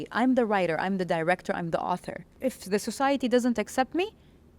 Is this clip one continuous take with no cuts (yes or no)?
no